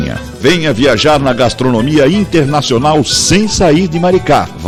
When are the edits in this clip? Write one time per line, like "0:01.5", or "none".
none